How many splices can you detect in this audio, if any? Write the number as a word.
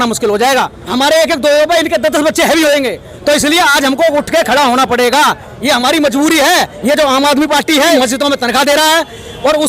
three